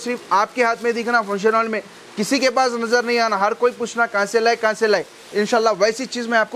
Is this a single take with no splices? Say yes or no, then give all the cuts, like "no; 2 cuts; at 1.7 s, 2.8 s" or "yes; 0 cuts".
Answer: yes; 0 cuts